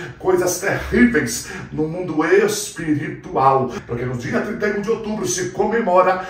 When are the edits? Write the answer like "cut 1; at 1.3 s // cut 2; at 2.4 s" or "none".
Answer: cut 1; at 3.8 s